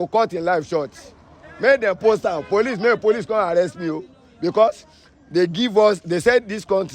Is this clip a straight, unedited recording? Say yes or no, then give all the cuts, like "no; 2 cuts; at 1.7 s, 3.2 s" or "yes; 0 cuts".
yes; 0 cuts